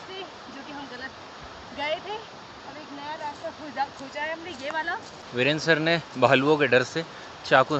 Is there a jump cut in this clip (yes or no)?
no